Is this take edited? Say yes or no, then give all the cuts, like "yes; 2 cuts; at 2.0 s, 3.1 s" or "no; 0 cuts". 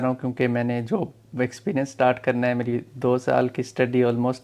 no; 0 cuts